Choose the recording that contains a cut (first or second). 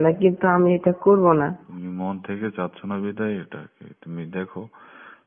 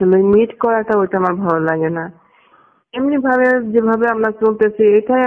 first